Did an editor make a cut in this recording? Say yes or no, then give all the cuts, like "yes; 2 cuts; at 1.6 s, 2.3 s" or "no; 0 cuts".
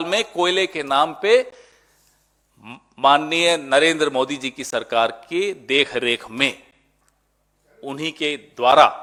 no; 0 cuts